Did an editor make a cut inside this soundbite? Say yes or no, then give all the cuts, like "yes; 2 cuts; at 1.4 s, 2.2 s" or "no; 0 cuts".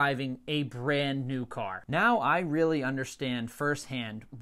yes; 1 cut; at 1.8 s